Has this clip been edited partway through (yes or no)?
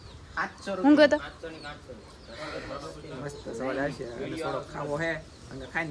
no